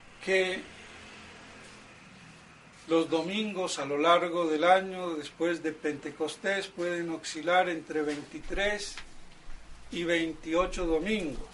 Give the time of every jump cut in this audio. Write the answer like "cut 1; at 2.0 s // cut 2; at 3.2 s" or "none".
cut 1; at 3.4 s